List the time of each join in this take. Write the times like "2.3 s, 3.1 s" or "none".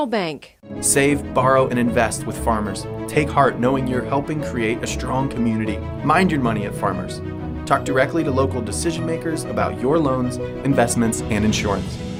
none